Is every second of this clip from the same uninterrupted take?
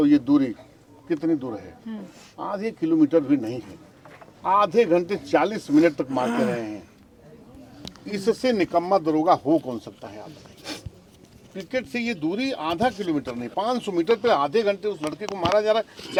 yes; 0 cuts

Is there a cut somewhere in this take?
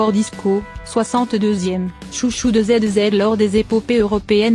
no; 0 cuts

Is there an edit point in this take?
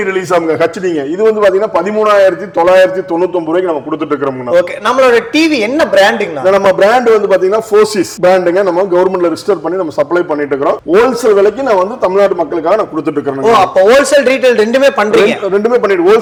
no; 0 cuts

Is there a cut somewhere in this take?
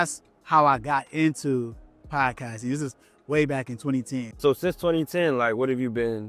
yes; 1 cut; at 4.3 s

